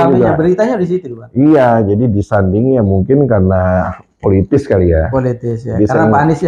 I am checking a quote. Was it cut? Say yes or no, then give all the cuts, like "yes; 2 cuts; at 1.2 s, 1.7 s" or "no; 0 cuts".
no; 0 cuts